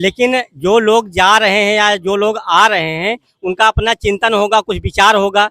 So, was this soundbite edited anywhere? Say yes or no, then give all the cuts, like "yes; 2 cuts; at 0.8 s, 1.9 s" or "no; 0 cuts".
no; 0 cuts